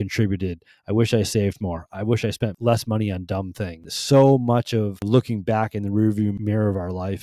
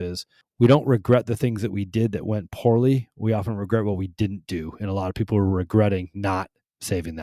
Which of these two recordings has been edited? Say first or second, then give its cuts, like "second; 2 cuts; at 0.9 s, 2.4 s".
first; 4 cuts; at 2.6 s, 3.9 s, 5.0 s, 6.4 s